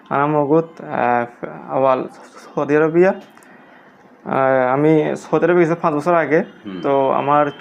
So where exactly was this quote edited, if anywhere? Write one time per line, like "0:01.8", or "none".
none